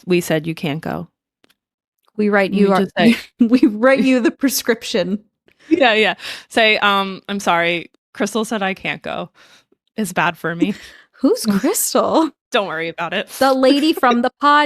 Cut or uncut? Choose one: cut